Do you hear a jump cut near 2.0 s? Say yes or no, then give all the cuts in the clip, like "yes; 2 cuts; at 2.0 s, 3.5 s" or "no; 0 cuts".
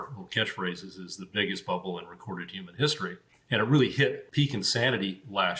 no; 2 cuts; at 3.3 s, 4.2 s